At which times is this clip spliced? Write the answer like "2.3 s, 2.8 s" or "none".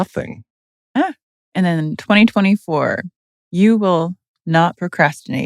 1.2 s